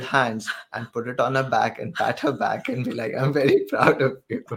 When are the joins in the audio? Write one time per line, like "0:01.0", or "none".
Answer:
none